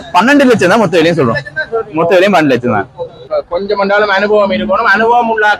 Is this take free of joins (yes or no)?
no